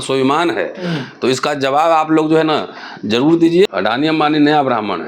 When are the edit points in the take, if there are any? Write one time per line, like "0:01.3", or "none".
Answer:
0:03.7